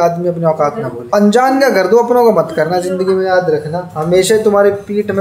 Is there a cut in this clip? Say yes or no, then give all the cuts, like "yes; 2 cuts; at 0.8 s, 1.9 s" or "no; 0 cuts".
yes; 1 cut; at 1.0 s